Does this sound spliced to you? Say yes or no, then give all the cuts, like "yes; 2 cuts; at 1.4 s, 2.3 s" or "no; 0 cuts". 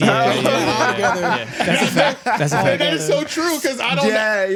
no; 0 cuts